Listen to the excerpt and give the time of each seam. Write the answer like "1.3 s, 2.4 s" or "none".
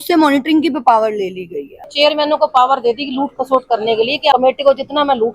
1.9 s, 4.3 s